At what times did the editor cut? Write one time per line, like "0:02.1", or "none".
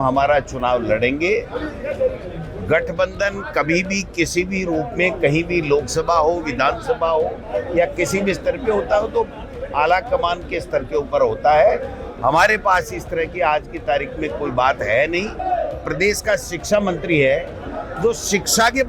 0:15.4

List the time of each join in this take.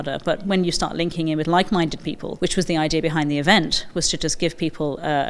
0:02.2

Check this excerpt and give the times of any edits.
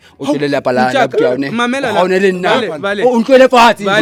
none

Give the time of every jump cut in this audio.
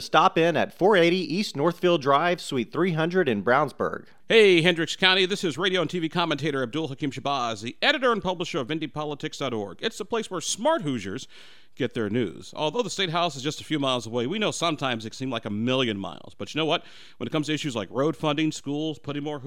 0:04.1

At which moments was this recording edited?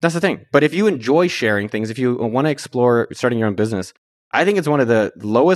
none

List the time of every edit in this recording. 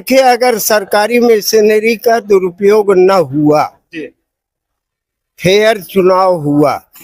none

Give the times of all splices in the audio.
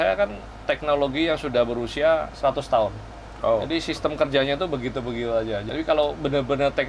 0:02.3
0:05.6

